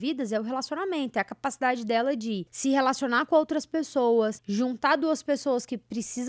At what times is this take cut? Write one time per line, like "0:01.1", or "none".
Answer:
0:02.5
0:04.4

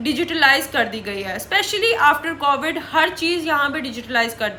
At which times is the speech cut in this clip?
none

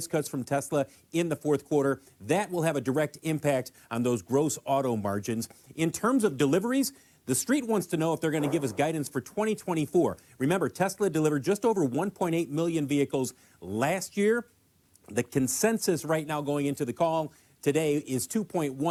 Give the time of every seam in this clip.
none

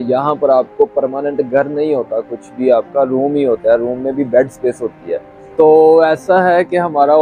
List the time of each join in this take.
0:05.4

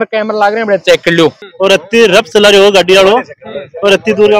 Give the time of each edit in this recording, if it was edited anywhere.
0:01.4

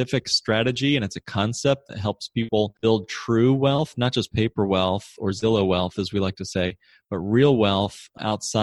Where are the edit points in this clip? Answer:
0:02.7

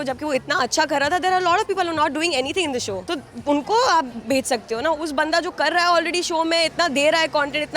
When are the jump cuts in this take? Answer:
0:03.0

